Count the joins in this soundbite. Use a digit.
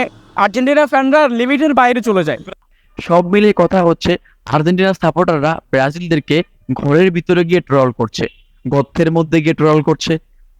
1